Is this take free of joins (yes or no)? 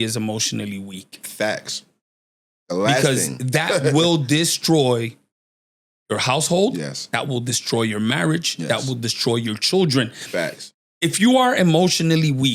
yes